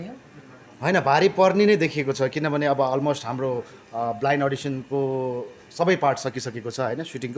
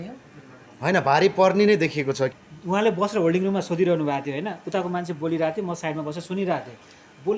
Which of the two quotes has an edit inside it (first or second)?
second